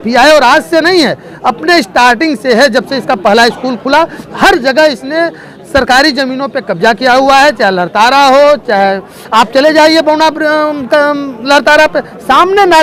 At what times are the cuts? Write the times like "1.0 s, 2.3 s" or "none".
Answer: none